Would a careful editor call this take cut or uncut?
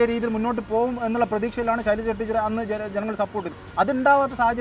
uncut